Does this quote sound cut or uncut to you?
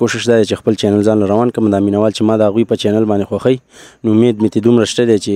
uncut